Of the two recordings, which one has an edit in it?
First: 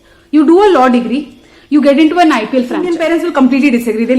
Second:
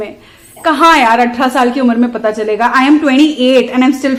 first; 1 cut; at 2.9 s

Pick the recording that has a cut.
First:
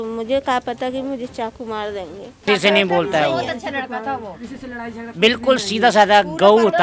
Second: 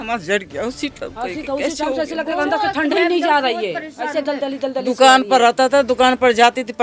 first; 1 cut; at 2.4 s

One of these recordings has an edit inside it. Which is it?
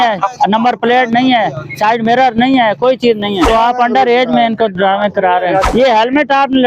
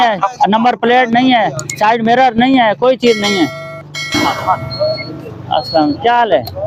first; 2 cuts; at 3.5 s, 5.7 s

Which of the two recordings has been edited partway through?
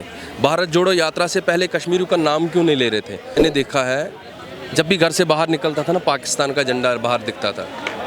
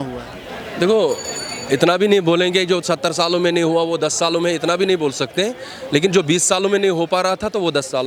first; 1 cut; at 3.4 s

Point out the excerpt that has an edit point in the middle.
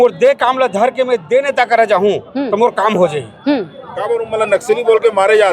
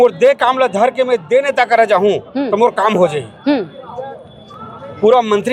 first; 1 cut; at 3.9 s

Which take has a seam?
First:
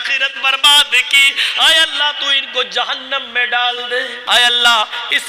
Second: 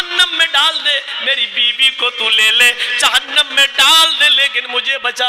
first; 1 cut; at 4.2 s

